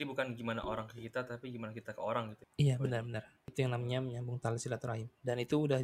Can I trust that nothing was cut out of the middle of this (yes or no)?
no